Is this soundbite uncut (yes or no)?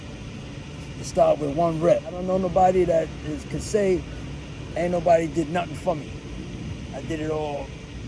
no